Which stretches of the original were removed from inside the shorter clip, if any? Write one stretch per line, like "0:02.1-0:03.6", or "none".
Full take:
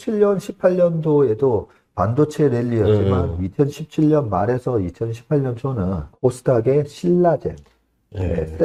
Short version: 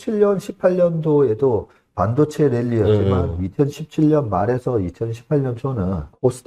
none